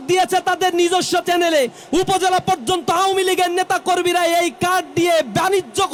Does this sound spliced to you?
no; 0 cuts

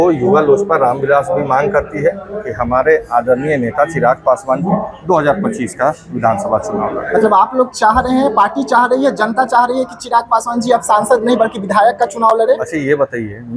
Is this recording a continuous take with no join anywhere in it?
yes; 0 cuts

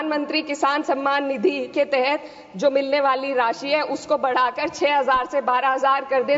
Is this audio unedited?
yes; 0 cuts

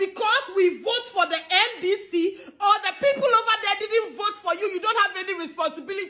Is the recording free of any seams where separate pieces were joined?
yes; 0 cuts

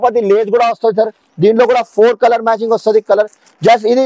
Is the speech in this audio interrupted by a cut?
no; 0 cuts

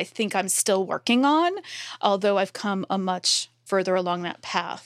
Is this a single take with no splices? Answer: no; 1 cut; at 3.6 s

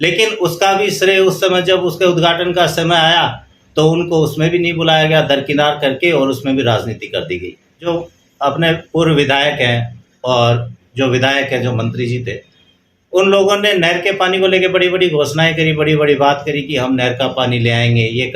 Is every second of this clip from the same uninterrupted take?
no; 1 cut; at 7.9 s

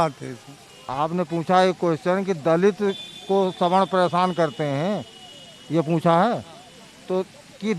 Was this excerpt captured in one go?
no; 1 cut; at 0.9 s

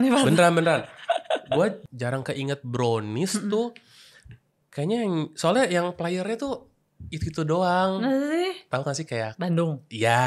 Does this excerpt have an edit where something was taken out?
yes; 1 cut; at 1.8 s

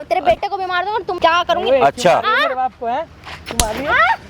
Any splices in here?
yes; 1 cut; at 1.1 s

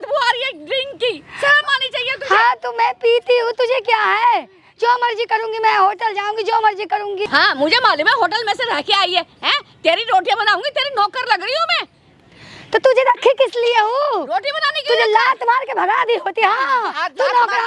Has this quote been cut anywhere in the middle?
no; 0 cuts

